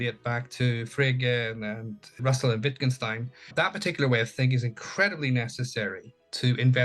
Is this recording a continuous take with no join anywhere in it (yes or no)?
no